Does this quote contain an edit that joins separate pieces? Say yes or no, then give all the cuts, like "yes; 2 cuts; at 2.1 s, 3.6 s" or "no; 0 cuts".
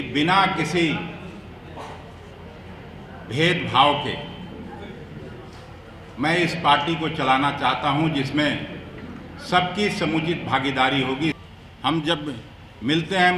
yes; 1 cut; at 11.4 s